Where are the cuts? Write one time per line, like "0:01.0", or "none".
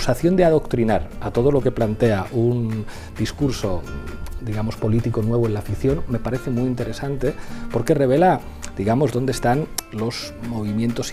none